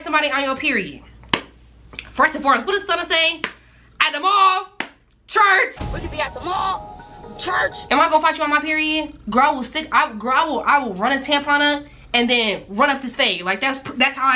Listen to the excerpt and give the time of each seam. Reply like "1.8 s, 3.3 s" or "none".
5.8 s, 7.8 s